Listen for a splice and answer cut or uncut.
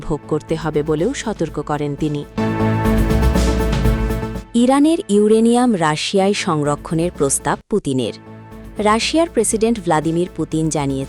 cut